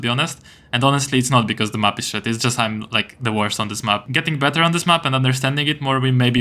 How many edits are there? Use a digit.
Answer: 1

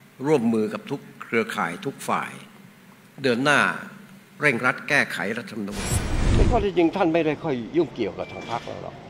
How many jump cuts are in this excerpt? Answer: 1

